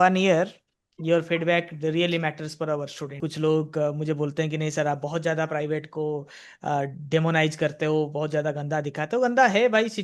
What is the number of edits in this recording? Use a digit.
1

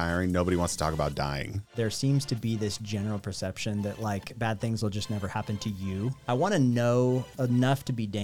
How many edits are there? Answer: 3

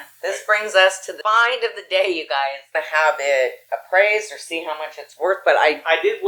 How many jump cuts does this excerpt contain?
2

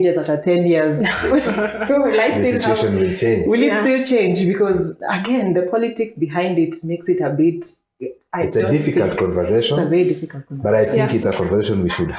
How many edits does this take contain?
0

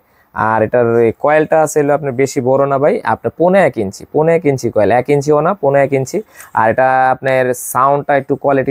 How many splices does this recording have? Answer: 0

